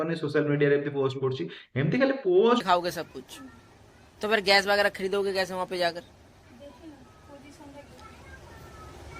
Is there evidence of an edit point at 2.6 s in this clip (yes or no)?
yes